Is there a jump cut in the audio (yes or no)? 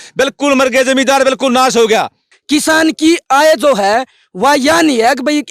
yes